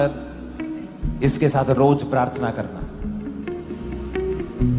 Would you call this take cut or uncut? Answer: uncut